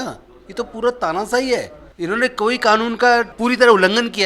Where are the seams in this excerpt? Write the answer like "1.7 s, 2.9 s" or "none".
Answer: 1.8 s, 3.3 s